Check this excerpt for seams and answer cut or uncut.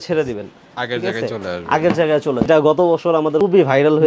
cut